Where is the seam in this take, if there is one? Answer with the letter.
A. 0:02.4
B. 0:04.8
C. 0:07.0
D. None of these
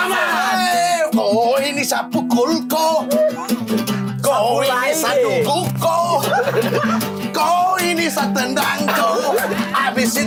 D